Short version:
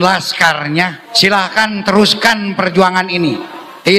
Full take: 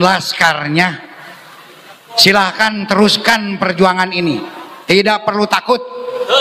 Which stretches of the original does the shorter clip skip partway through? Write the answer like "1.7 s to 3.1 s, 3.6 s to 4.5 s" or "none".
1.0 s to 2.1 s